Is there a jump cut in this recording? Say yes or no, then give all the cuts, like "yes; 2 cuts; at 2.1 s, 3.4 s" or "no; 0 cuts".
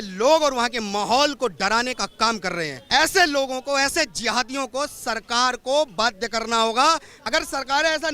yes; 2 cuts; at 2.8 s, 7.1 s